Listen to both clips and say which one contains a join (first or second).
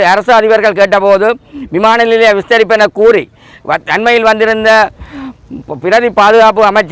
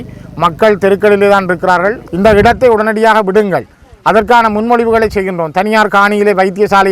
second